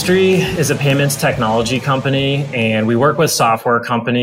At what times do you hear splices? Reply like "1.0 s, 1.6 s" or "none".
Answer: none